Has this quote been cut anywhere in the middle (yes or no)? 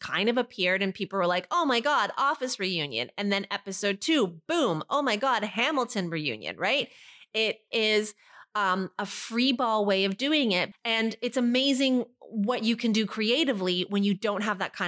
yes